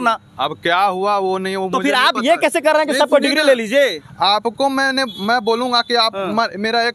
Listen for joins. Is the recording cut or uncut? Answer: uncut